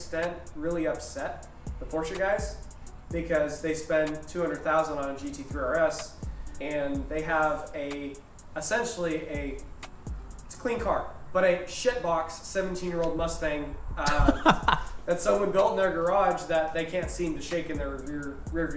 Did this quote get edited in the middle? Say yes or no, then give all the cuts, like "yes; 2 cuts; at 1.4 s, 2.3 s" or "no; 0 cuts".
no; 0 cuts